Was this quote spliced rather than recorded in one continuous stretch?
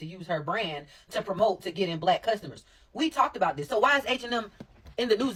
no; 0 cuts

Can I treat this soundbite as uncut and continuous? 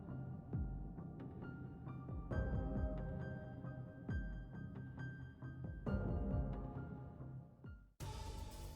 no; 1 cut; at 7.8 s

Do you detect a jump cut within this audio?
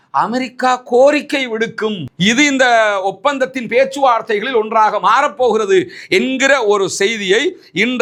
no; 0 cuts

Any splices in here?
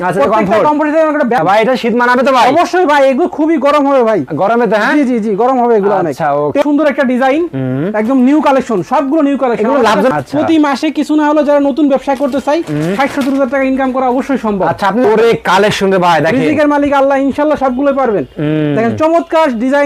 yes; 4 cuts; at 1.4 s, 6.6 s, 10.1 s, 15.0 s

